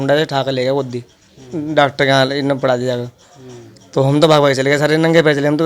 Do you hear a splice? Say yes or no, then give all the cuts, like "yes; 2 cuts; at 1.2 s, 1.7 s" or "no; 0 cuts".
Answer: no; 0 cuts